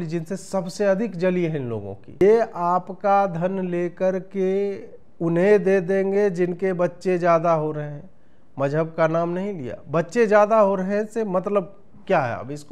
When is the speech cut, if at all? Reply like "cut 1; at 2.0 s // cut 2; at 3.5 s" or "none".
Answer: cut 1; at 2.2 s